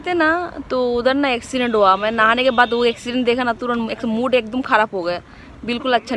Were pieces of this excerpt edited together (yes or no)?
no